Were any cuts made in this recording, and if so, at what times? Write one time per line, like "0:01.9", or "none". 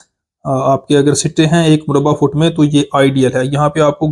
none